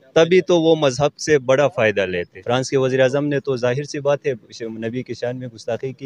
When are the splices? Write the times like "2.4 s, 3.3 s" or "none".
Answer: 2.3 s